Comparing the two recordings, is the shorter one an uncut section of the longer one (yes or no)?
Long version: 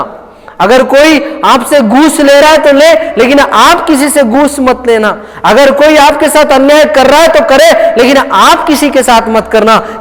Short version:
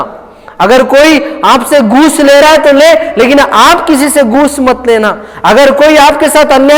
yes